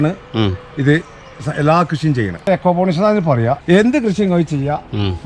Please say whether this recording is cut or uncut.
cut